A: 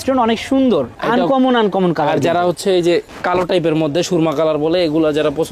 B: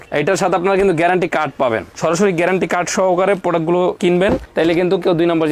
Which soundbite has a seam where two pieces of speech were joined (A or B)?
A